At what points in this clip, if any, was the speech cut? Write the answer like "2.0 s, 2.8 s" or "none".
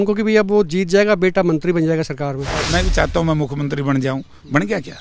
2.7 s